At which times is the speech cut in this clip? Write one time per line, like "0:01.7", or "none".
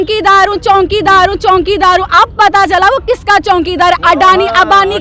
none